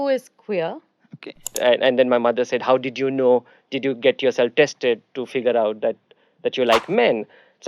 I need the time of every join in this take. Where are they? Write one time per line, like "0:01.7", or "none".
0:01.5